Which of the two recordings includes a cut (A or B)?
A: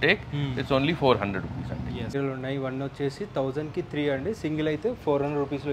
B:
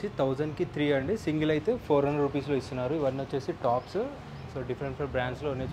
A